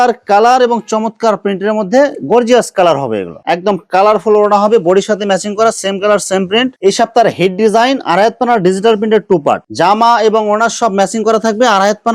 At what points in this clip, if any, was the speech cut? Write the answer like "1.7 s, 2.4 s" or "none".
3.4 s, 6.7 s, 9.7 s

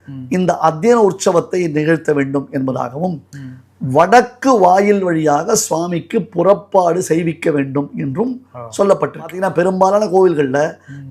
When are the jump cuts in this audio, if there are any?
9.4 s

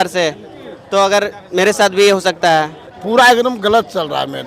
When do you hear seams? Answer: 2.8 s

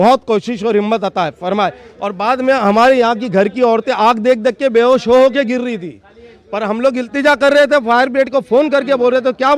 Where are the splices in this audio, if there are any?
none

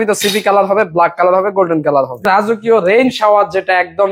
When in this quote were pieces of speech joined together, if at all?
2.2 s

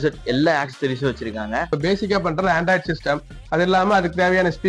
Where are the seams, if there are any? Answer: 1.8 s

